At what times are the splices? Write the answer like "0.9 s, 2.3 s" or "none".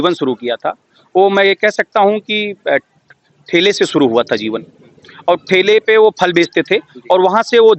none

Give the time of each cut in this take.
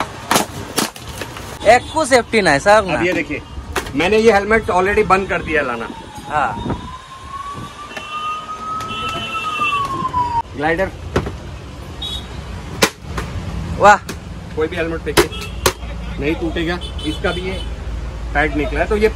1.5 s, 10.5 s

